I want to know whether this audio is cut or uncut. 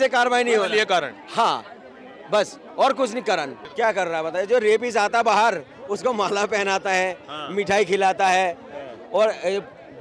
cut